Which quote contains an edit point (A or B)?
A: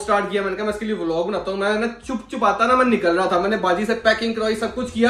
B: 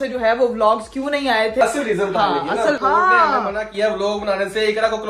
B